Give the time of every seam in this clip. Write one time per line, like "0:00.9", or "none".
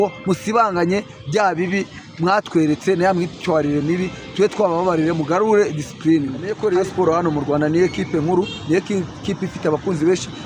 0:06.5